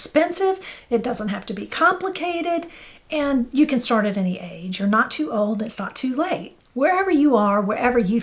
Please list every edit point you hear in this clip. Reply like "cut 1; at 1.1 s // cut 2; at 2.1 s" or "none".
cut 1; at 6.5 s